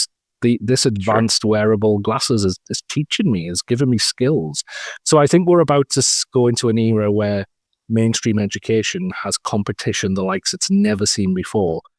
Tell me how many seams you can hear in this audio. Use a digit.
0